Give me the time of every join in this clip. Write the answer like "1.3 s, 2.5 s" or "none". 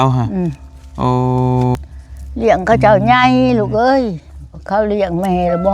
1.8 s